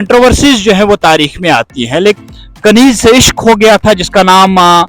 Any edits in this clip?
yes; 1 cut; at 2.2 s

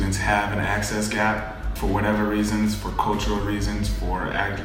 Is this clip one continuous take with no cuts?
no; 1 cut; at 1.7 s

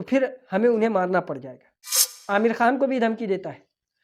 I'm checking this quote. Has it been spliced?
yes; 1 cut; at 2.1 s

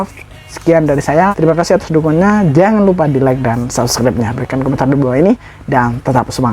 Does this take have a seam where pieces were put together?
yes; 1 cut; at 1.3 s

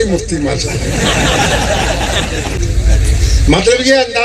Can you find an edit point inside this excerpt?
yes; 1 cut; at 2.6 s

